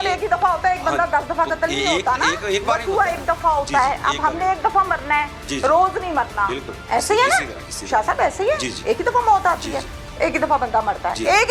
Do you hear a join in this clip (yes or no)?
no